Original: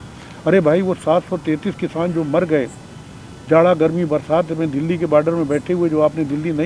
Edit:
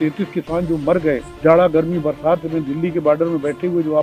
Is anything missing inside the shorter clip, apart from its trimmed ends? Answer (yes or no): yes